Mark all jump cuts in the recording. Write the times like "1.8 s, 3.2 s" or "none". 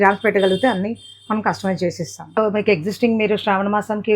2.4 s